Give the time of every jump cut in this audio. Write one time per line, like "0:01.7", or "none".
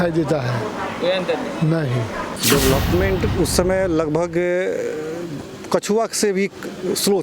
0:02.3

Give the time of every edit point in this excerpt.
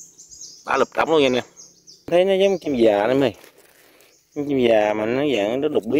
0:02.1

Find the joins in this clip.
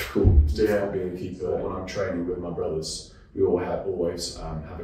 0:01.6

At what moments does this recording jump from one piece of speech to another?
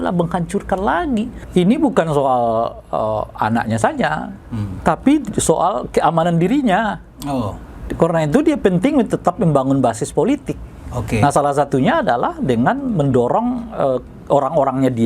0:01.4

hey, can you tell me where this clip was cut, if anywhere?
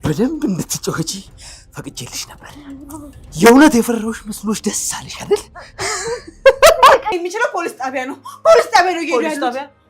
0:07.1

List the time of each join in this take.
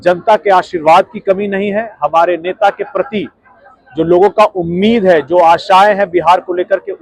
none

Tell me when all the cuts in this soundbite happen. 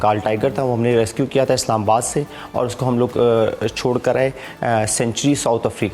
none

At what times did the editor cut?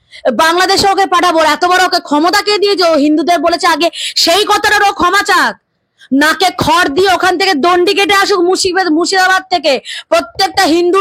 none

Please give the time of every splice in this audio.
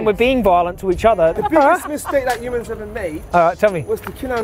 0:01.3
0:03.2

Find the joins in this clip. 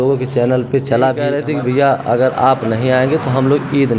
0:01.4

